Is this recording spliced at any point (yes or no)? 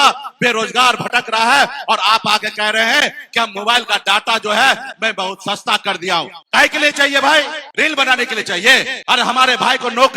yes